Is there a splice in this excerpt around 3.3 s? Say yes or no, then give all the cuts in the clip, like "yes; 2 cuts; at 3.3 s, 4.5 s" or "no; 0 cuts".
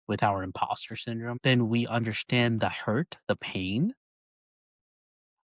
no; 1 cut; at 1.3 s